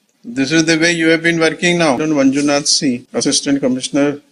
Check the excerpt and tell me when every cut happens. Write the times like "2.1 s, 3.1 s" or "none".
2.0 s, 3.0 s